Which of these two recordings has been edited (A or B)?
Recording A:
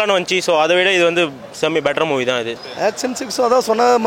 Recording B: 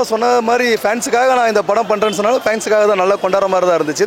A